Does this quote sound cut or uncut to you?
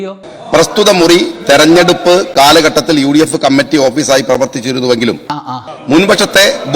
cut